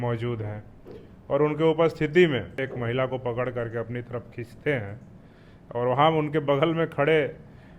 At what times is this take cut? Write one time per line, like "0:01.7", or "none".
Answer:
0:02.6